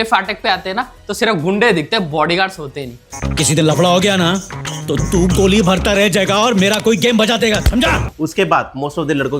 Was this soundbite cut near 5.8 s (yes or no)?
no